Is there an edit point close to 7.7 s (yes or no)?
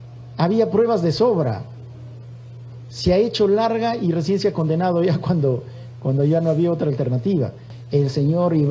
yes